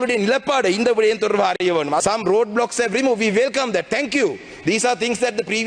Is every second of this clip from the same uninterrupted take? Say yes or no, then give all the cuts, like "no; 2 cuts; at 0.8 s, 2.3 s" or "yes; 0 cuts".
no; 1 cut; at 2.0 s